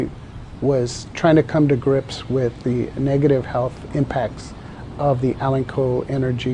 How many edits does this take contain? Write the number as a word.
one